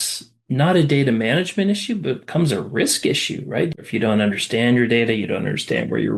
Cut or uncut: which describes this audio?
cut